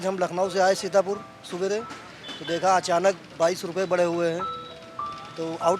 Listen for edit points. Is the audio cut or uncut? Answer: uncut